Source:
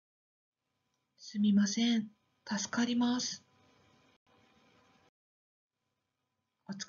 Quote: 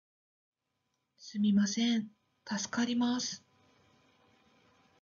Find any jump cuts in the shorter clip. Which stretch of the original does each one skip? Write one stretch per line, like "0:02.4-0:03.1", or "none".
0:04.2-0:04.3